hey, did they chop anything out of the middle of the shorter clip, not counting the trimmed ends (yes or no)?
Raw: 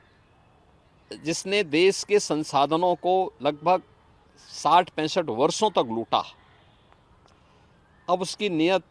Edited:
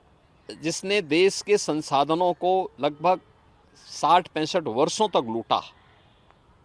no